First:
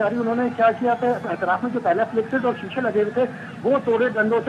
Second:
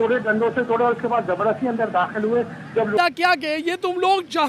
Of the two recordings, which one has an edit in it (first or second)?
second